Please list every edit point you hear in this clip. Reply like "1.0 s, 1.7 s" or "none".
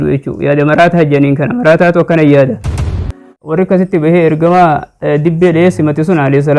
3.2 s

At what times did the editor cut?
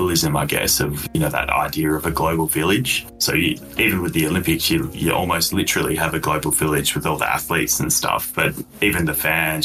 none

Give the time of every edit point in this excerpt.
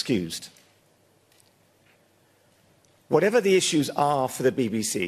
4.1 s

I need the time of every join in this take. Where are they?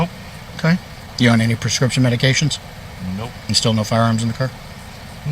1.0 s, 3.4 s

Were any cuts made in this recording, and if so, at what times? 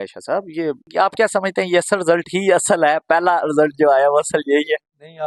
none

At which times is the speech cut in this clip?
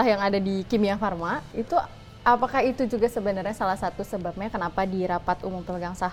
none

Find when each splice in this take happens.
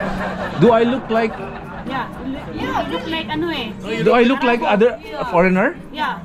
none

